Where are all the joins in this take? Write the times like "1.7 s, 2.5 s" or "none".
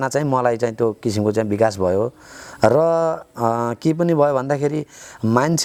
none